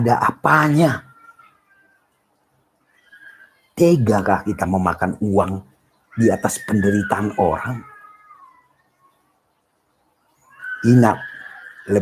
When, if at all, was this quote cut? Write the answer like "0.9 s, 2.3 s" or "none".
none

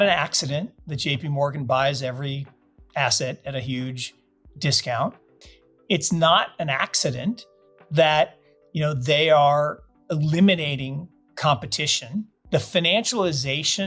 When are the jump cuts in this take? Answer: 5.3 s, 12.4 s

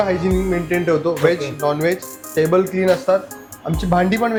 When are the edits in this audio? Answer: none

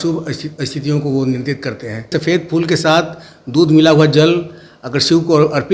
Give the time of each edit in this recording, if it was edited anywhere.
2.1 s

